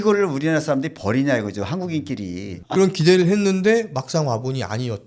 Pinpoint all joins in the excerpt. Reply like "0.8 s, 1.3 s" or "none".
2.5 s